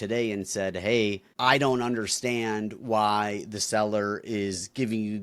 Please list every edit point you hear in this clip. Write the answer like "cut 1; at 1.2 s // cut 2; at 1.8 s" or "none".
cut 1; at 1.3 s

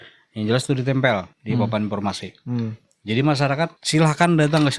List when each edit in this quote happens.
cut 1; at 1.3 s // cut 2; at 3.8 s

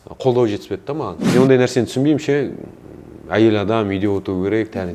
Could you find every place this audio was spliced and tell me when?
cut 1; at 1.1 s

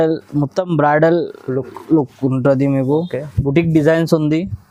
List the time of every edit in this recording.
none

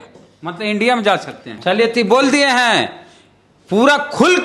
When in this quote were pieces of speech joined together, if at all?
cut 1; at 1.4 s

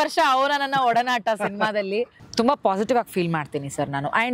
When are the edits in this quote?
cut 1; at 2.3 s

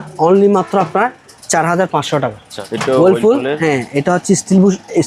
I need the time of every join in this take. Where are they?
cut 1; at 2.5 s

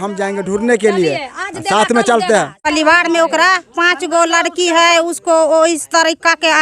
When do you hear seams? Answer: cut 1; at 2.6 s

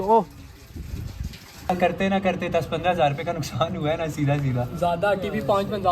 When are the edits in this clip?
cut 1; at 1.7 s

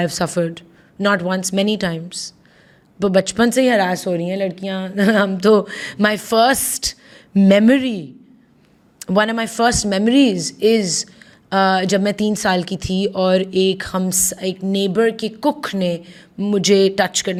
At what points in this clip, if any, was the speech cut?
none

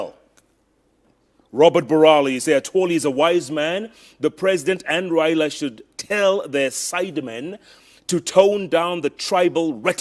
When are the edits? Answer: none

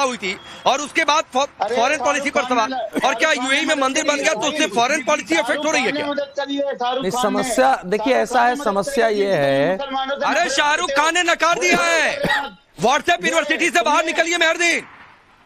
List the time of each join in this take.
cut 1; at 13.5 s

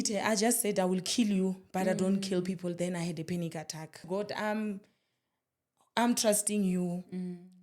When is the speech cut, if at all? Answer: cut 1; at 4.0 s

